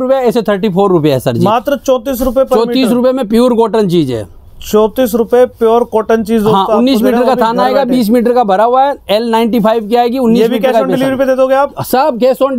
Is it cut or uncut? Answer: uncut